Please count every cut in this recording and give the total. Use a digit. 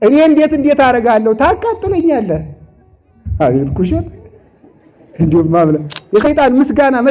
1